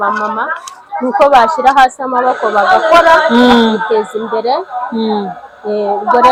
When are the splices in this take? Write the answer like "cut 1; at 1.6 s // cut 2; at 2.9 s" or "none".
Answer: none